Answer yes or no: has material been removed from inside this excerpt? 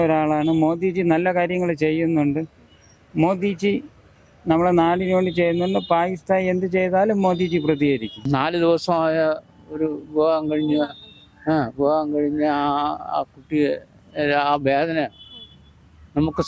yes